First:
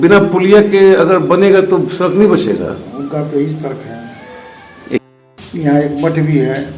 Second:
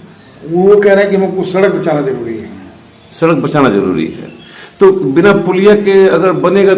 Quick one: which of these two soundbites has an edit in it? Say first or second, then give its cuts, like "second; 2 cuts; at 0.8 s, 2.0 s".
first; 1 cut; at 5.0 s